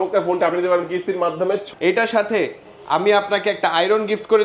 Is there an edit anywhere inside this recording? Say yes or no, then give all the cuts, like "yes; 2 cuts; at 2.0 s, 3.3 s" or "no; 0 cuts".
yes; 1 cut; at 1.6 s